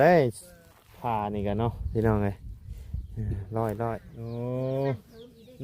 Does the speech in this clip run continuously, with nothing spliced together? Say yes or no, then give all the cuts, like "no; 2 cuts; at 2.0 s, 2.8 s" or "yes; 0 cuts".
no; 1 cut; at 4.1 s